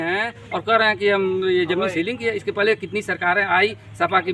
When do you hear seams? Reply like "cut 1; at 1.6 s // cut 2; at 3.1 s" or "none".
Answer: none